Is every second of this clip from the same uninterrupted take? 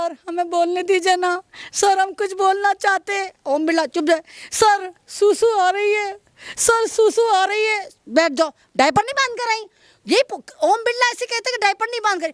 yes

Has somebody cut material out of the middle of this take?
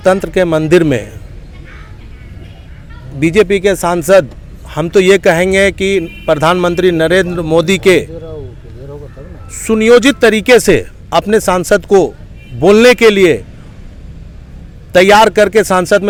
no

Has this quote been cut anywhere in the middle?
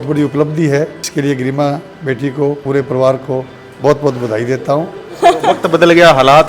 yes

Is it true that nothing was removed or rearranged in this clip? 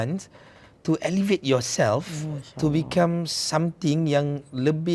yes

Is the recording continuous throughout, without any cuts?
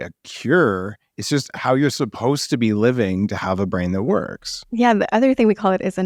yes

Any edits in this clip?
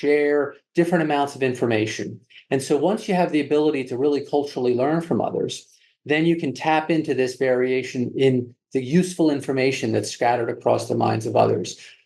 no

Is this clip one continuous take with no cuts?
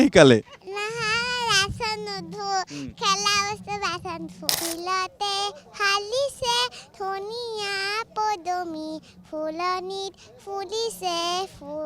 no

